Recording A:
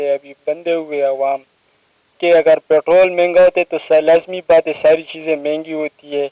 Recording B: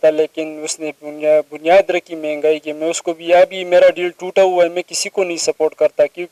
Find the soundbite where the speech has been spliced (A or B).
A